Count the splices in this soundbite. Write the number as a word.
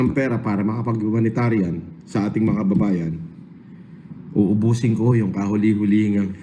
zero